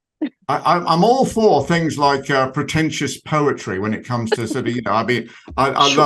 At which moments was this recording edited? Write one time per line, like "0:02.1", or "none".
none

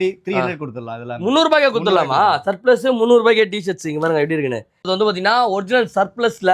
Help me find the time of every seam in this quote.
0:04.8

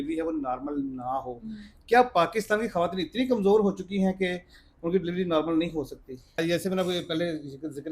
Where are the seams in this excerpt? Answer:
0:06.4

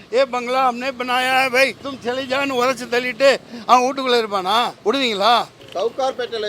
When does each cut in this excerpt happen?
0:01.9
0:04.7
0:05.6

